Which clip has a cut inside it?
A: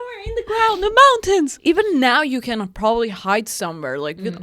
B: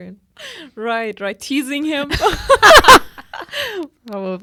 A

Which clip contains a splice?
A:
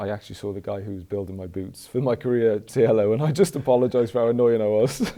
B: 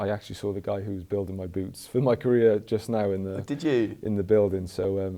A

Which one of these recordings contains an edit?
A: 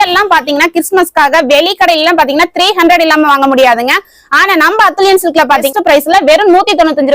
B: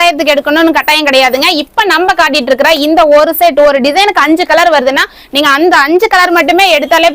A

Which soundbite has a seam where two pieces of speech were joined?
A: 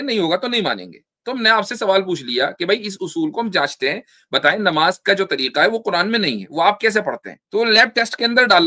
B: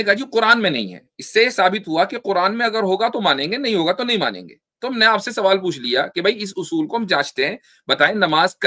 A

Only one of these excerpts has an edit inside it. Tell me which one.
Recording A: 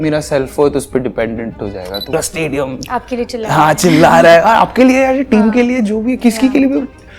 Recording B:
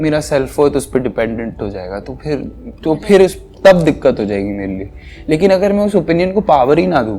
A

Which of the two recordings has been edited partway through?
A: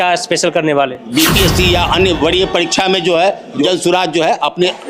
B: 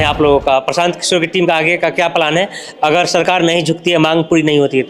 A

